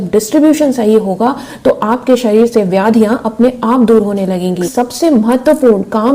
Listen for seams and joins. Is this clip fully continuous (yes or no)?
no